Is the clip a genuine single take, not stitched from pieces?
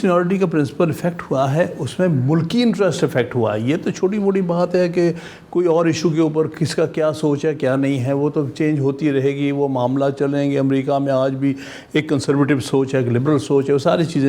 yes; 0 cuts

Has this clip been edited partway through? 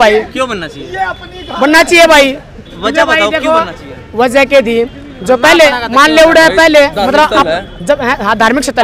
no; 0 cuts

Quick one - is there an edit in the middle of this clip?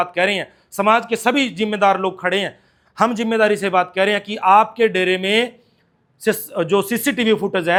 no; 0 cuts

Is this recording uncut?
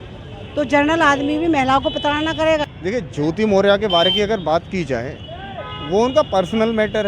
no; 1 cut; at 2.7 s

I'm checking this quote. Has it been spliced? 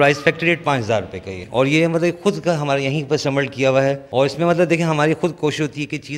yes; 2 cuts; at 1.3 s, 4.0 s

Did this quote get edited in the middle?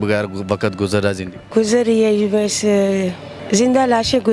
yes; 2 cuts; at 1.3 s, 3.3 s

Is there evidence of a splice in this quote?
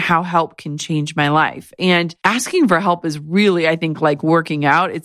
yes; 1 cut; at 2.1 s

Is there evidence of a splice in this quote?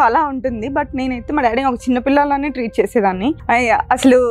no; 0 cuts

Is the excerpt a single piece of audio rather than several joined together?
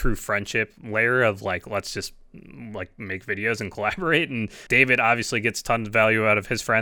no; 1 cut; at 4.6 s

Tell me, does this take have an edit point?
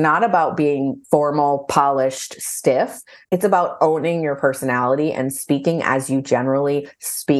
yes; 1 cut; at 1.0 s

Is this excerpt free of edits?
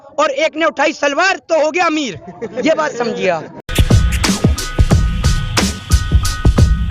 yes; 0 cuts

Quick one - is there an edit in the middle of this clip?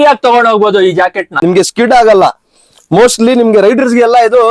yes; 1 cut; at 1.3 s

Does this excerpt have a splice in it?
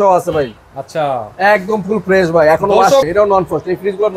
yes; 1 cut; at 3.1 s

